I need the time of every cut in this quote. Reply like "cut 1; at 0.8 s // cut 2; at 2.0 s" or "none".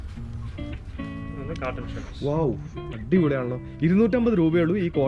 none